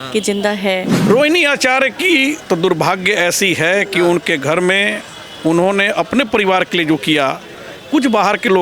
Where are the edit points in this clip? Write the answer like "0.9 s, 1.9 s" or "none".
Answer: 1.0 s